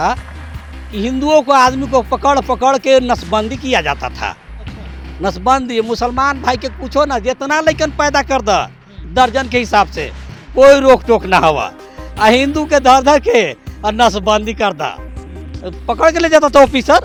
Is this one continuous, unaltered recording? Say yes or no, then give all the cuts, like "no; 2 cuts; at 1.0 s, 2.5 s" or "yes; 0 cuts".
yes; 0 cuts